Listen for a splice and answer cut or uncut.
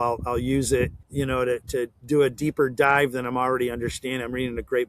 cut